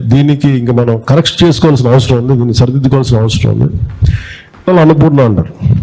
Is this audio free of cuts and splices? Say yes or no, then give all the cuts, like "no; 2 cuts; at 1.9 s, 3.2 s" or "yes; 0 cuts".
no; 1 cut; at 4.7 s